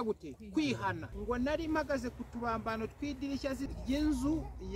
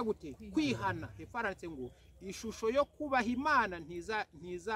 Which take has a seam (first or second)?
first